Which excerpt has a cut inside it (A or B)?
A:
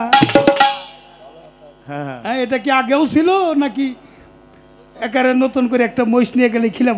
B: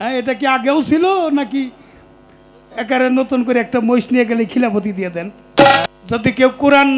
B